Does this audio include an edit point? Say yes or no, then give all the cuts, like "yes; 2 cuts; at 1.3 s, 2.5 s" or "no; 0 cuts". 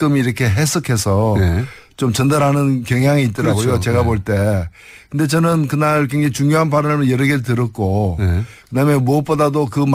no; 0 cuts